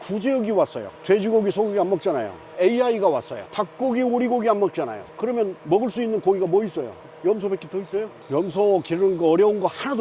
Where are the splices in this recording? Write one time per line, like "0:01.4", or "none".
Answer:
0:02.5
0:08.3